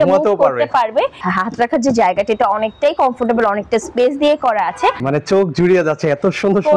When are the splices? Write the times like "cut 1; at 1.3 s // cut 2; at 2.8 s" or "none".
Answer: cut 1; at 1.2 s // cut 2; at 5.0 s